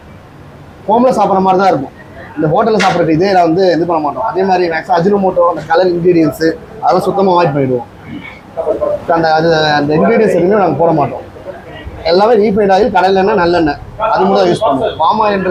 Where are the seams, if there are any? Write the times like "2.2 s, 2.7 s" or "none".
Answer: none